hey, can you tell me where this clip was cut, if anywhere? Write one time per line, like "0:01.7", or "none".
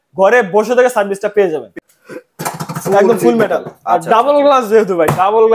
0:01.7